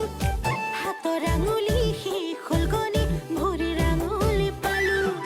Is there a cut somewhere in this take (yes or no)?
no